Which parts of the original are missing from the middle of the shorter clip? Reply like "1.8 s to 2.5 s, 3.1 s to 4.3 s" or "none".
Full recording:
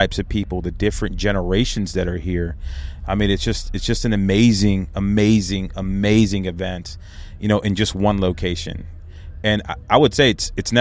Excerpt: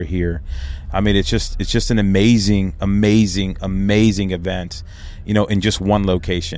none